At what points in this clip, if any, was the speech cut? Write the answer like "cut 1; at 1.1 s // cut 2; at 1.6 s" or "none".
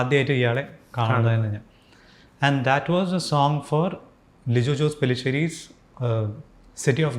none